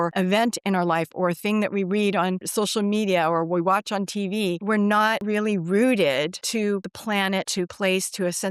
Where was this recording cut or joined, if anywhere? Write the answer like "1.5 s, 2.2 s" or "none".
2.4 s, 6.9 s

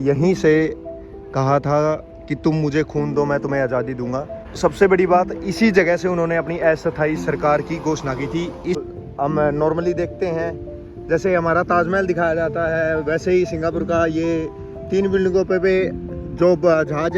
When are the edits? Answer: 4.4 s, 8.9 s

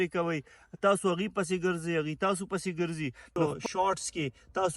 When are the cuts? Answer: 3.5 s

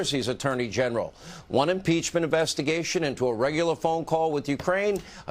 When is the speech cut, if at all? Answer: 3.3 s

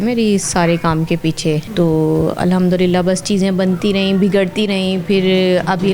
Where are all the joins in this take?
none

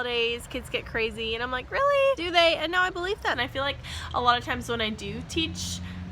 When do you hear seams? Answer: 3.4 s

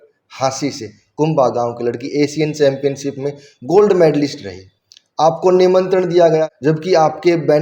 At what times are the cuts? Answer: 6.5 s

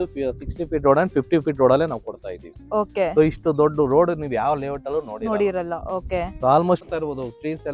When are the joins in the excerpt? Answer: 6.8 s

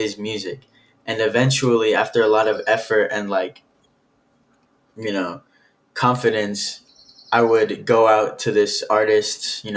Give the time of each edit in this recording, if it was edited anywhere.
none

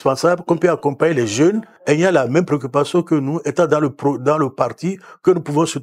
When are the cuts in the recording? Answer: 1.7 s

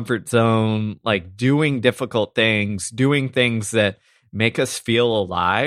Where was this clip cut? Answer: none

